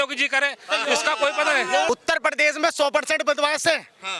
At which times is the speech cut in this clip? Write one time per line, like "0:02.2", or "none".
0:01.9